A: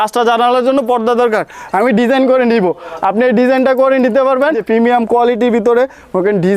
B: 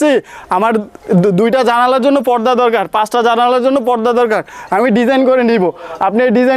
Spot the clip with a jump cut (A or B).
A